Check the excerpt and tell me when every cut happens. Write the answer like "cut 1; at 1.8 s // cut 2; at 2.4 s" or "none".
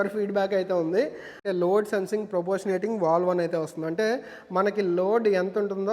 cut 1; at 1.4 s